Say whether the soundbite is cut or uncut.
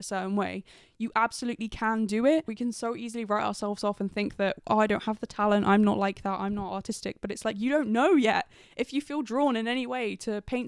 cut